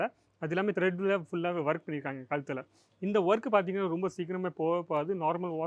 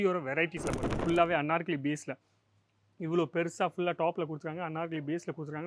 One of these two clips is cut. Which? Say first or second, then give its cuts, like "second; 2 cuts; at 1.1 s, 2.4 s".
second; 1 cut; at 0.9 s